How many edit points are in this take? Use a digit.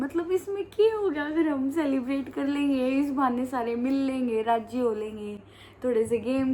0